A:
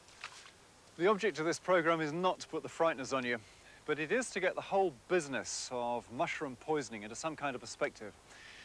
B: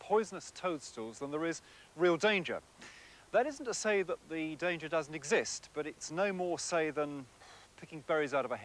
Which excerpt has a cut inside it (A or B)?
B